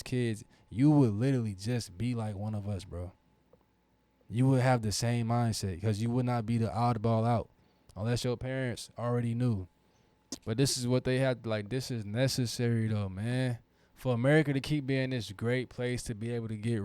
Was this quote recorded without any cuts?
no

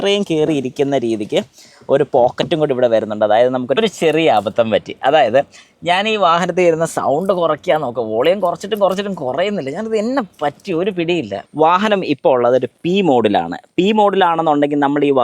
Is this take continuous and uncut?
no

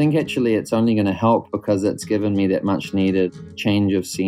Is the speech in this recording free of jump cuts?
no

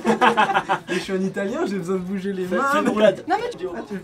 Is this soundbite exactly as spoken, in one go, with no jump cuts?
no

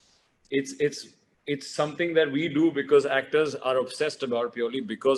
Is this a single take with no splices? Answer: yes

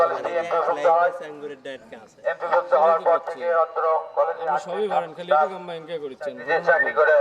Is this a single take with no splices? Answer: yes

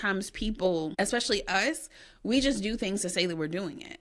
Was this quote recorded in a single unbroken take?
no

